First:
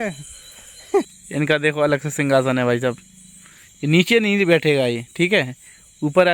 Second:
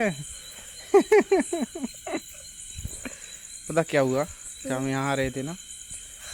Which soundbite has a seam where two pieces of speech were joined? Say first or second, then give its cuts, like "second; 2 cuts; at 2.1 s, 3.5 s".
first; 1 cut; at 1.1 s